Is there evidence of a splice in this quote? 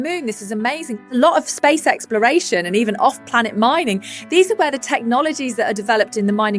yes; 1 cut; at 1.0 s

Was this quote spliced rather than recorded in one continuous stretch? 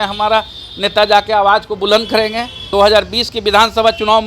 yes; 1 cut; at 2.5 s

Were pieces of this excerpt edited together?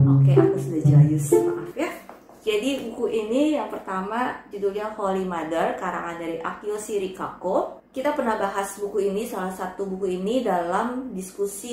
no; 0 cuts

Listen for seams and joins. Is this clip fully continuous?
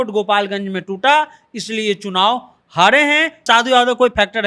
no; 1 cut; at 3.4 s

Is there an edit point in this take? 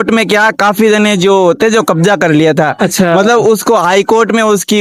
no; 0 cuts

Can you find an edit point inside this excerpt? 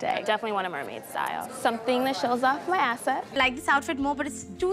yes; 1 cut; at 3.3 s

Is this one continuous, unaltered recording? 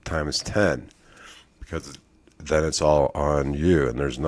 yes; 0 cuts

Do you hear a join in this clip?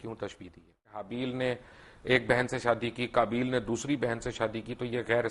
yes; 1 cut; at 1.1 s

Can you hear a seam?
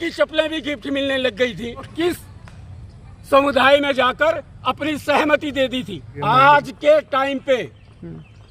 yes; 2 cuts; at 1.9 s, 6.1 s

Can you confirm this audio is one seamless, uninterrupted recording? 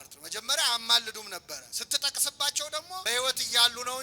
no; 2 cuts; at 1.7 s, 3.0 s

